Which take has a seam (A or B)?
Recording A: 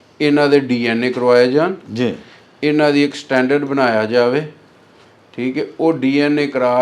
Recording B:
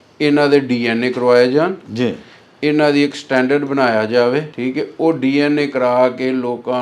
B